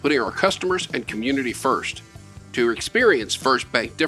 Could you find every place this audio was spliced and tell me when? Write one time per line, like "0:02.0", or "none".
none